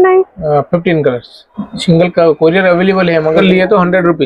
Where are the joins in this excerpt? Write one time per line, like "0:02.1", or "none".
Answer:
0:01.5
0:03.4